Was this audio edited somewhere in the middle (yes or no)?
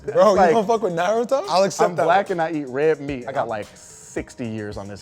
yes